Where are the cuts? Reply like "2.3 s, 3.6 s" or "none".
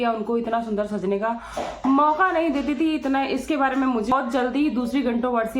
4.1 s

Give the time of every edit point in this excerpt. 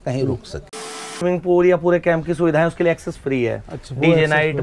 1.2 s

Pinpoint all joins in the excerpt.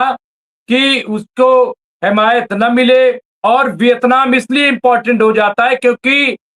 3.3 s

